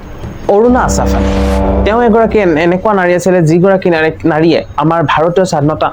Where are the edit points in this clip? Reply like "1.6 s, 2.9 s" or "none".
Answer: none